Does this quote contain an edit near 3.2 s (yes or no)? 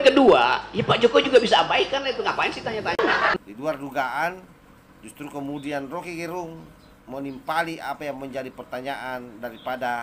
yes